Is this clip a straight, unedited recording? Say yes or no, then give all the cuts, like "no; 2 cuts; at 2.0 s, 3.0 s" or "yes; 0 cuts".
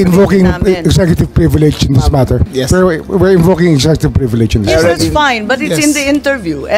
no; 1 cut; at 2.5 s